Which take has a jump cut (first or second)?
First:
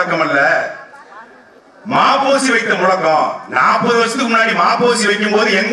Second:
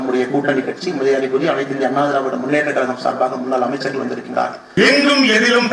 second